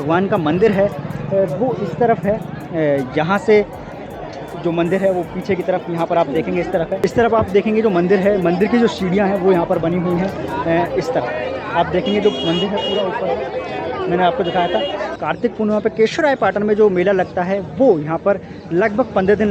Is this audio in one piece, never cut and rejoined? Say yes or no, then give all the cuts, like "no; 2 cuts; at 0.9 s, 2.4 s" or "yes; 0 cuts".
yes; 0 cuts